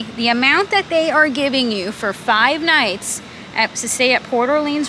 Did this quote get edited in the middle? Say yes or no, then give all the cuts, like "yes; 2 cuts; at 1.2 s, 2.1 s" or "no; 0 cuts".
no; 0 cuts